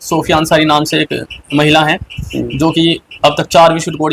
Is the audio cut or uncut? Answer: uncut